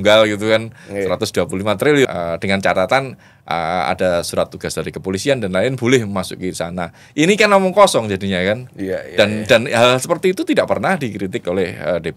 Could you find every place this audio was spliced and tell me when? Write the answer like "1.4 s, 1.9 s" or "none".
2.1 s

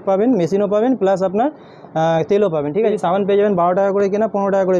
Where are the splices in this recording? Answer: 2.9 s

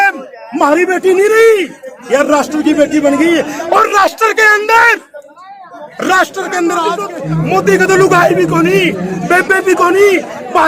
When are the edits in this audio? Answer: 7.1 s

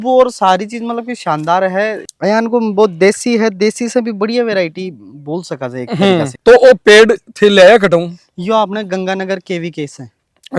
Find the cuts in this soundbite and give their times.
none

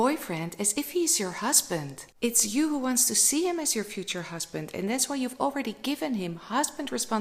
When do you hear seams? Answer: none

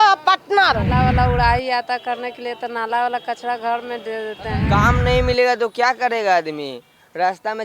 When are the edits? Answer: 0.9 s, 4.7 s

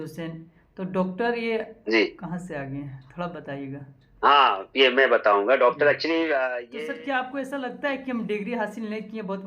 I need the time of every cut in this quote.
6.6 s

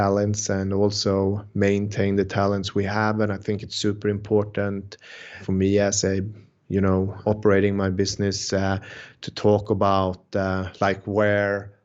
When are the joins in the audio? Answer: none

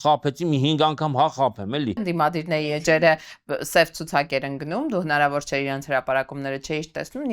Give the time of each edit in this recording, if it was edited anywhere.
2.0 s

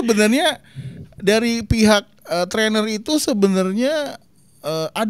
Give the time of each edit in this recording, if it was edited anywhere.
none

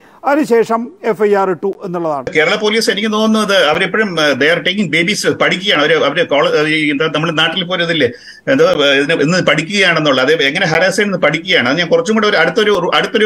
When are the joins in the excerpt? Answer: 2.3 s

